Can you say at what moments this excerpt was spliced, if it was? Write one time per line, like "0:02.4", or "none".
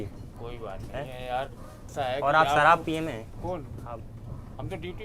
0:01.9